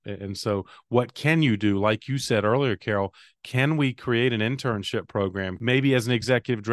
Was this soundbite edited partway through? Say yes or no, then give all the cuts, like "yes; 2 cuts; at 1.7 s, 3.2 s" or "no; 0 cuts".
yes; 1 cut; at 5.5 s